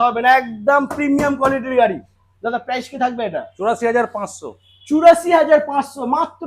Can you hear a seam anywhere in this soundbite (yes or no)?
no